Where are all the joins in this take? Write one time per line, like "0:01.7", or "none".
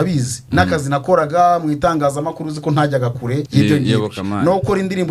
0:03.5

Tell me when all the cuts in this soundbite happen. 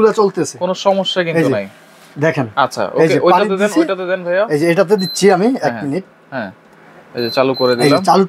none

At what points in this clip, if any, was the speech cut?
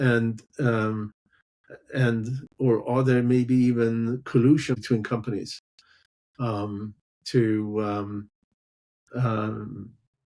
0:04.8

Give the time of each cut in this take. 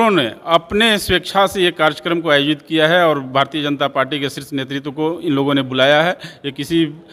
none

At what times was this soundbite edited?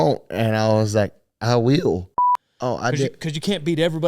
0:02.2

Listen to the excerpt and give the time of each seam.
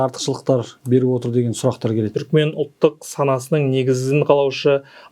0:02.1

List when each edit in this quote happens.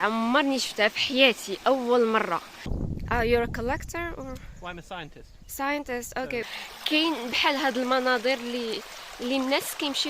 0:02.6
0:06.4

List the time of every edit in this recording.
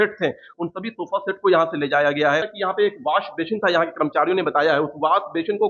0:02.5

